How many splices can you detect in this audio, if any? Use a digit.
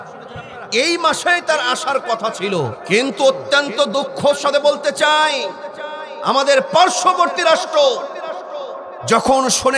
1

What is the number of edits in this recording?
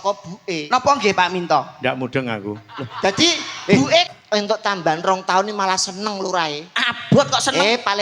1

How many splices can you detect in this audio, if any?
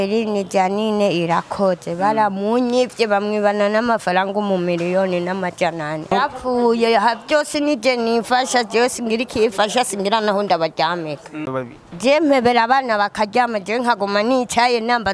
2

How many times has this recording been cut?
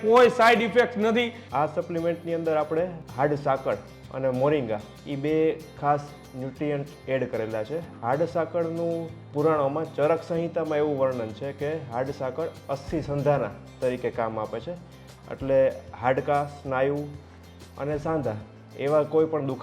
2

